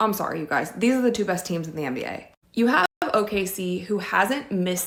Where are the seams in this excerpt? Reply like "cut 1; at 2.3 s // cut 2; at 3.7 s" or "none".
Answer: none